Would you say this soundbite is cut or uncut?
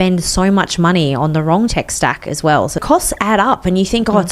cut